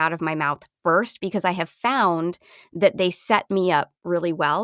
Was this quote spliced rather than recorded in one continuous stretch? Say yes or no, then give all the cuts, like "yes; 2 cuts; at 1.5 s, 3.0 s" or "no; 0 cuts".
no; 0 cuts